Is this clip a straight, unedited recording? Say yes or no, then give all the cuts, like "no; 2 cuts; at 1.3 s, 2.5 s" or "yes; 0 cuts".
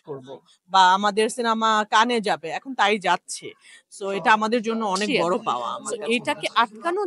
no; 1 cut; at 5.9 s